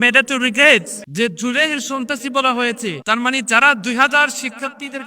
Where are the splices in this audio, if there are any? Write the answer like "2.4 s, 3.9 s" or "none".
1.0 s, 3.0 s